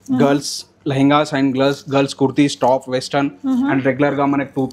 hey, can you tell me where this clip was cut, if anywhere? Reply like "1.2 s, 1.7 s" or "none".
none